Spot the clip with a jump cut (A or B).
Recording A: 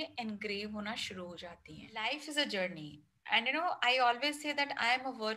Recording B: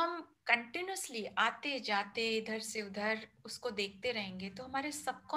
A